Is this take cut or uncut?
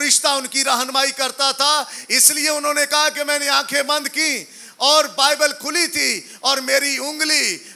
uncut